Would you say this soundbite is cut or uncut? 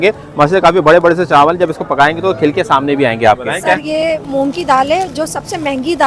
cut